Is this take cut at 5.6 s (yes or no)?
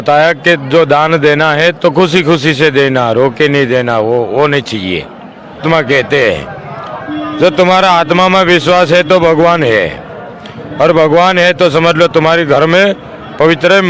yes